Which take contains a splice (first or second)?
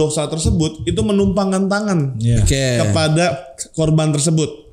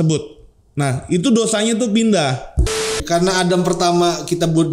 second